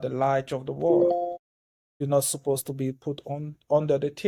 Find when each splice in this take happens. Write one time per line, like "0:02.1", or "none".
none